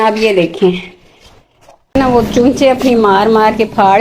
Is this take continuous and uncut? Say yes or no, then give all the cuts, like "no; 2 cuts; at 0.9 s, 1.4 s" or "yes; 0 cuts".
no; 1 cut; at 1.9 s